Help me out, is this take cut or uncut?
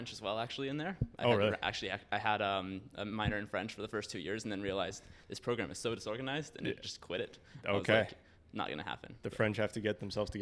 uncut